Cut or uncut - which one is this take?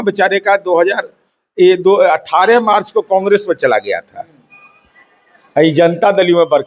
uncut